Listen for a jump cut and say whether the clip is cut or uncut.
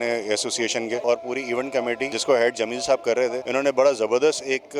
cut